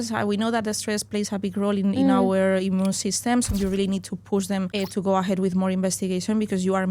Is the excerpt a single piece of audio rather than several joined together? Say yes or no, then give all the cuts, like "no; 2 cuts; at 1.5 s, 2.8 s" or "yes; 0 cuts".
no; 2 cuts; at 3.5 s, 4.7 s